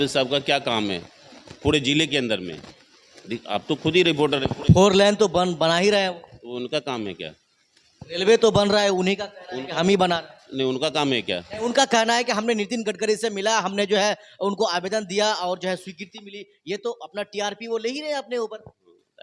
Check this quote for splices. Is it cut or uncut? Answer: uncut